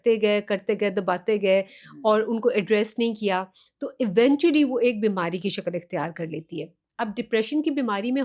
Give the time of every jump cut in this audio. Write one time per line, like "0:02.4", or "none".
none